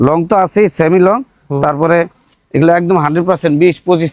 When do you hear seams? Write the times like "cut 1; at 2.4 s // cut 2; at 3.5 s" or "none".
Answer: none